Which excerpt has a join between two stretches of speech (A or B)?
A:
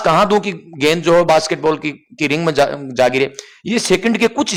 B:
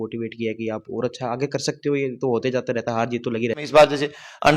B